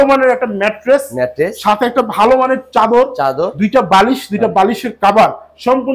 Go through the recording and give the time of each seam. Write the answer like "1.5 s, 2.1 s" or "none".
none